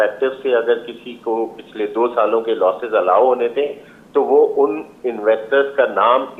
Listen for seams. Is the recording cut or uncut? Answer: uncut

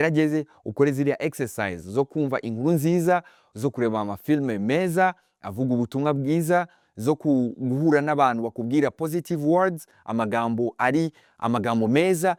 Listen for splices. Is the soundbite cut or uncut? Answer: uncut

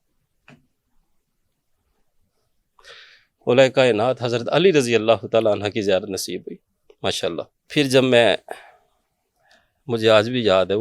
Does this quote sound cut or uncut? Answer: cut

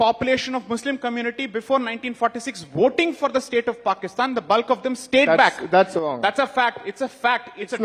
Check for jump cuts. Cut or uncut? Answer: uncut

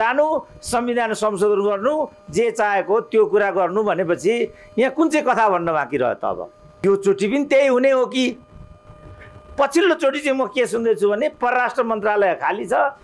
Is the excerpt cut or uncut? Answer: cut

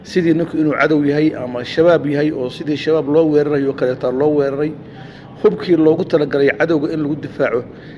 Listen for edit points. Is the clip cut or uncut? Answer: uncut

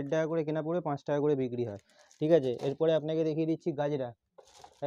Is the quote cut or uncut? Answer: uncut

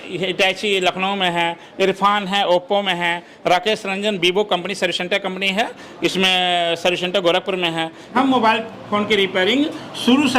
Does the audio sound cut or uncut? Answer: cut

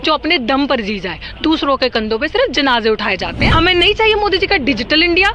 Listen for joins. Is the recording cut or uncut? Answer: cut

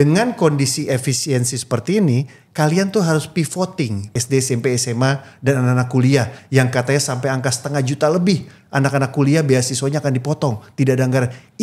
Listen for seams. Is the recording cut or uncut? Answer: cut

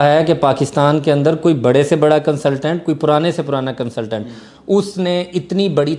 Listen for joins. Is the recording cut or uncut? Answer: uncut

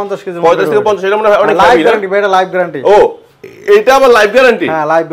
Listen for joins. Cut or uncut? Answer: uncut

